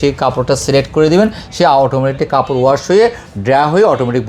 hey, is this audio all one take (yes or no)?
yes